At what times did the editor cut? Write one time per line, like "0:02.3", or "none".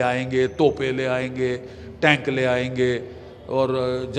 none